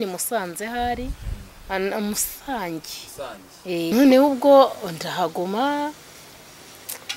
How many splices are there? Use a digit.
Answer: 1